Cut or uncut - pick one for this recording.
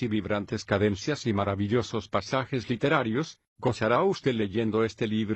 cut